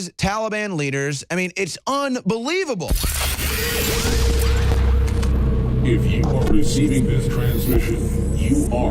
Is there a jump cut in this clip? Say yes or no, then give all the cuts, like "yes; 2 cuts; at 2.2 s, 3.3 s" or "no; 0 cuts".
yes; 1 cut; at 2.9 s